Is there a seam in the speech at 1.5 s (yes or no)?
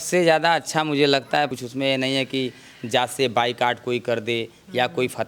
yes